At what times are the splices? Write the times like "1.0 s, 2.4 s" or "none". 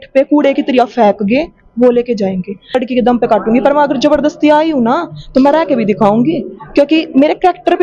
2.8 s